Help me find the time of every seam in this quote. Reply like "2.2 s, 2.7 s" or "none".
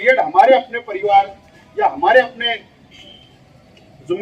none